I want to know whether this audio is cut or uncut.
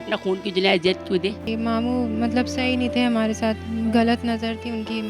cut